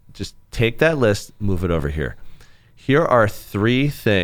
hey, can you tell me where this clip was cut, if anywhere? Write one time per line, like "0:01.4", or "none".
none